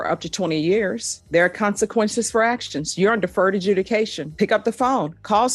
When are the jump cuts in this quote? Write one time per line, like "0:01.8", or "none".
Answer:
0:01.2